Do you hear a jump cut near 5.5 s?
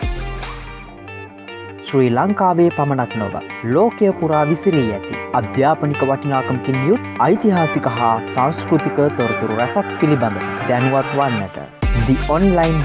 no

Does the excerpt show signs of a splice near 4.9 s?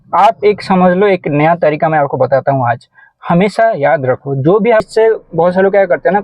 yes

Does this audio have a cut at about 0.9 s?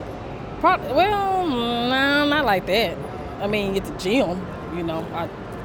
no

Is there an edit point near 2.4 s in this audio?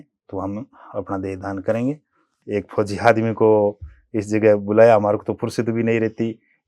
yes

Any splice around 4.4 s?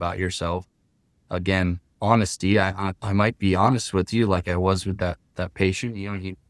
no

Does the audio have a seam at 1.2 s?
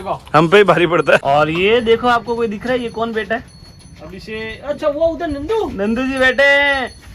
yes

